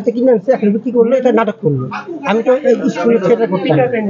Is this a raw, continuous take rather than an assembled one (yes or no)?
yes